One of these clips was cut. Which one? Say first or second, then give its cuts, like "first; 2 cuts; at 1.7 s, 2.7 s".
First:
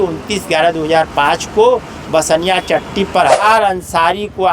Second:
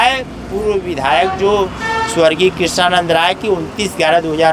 first; 1 cut; at 3.4 s